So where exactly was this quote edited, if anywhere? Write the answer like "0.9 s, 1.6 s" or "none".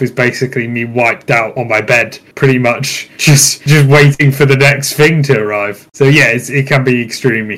none